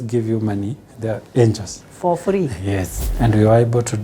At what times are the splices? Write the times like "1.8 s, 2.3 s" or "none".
3.0 s

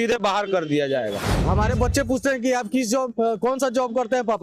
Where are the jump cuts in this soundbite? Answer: 1.3 s

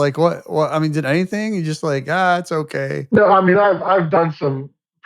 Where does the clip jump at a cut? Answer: 3.0 s

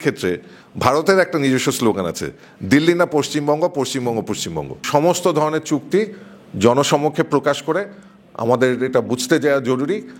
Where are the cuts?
4.8 s

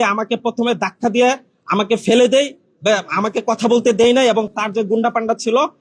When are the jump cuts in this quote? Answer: none

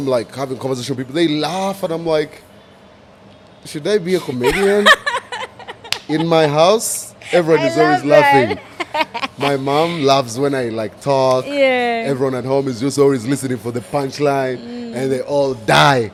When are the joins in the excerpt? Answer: none

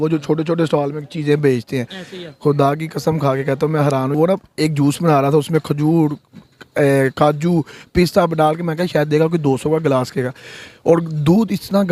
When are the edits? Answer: 4.2 s

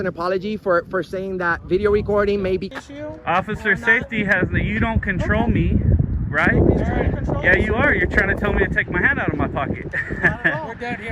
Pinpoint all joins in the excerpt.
2.7 s

